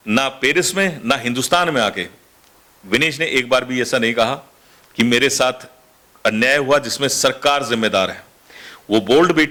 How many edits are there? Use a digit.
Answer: 0